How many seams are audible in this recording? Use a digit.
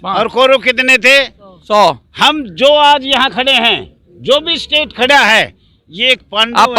0